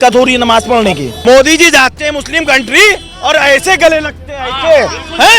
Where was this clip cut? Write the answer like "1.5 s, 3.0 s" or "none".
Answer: 1.1 s